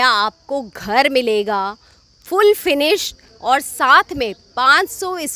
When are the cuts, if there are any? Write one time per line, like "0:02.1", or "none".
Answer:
none